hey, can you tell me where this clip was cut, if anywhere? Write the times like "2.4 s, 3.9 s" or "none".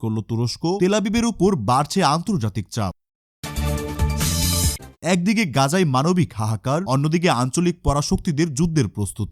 none